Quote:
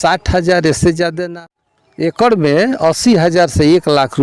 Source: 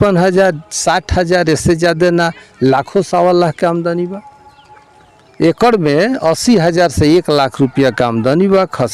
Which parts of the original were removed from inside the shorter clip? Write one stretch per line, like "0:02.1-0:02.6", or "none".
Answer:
0:02.0-0:04.6